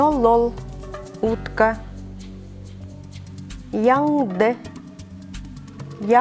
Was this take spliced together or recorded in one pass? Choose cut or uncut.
uncut